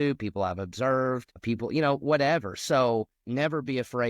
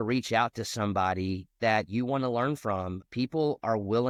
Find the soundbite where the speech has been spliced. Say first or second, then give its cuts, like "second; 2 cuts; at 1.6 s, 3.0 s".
first; 1 cut; at 3.2 s